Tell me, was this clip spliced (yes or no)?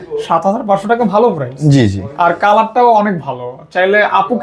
no